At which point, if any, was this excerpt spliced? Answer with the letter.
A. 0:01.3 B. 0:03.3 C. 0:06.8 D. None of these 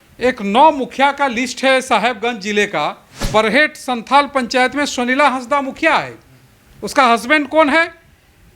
B